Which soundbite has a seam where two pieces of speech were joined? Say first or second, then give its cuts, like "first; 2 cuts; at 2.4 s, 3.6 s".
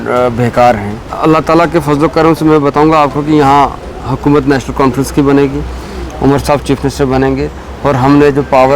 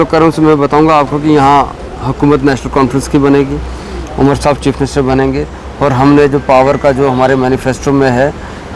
first; 1 cut; at 1.0 s